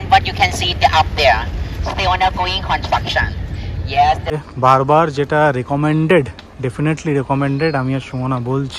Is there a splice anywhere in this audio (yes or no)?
yes